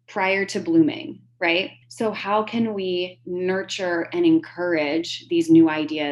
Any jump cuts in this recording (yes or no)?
yes